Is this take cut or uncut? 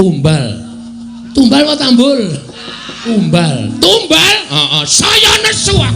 cut